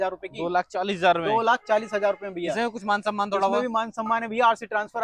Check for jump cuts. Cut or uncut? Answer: uncut